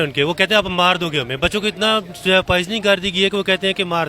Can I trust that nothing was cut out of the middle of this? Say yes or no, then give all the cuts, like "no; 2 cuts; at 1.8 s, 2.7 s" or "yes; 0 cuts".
yes; 0 cuts